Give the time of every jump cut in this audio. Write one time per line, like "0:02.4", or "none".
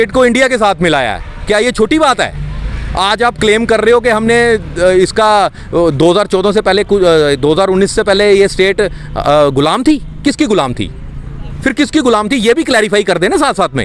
none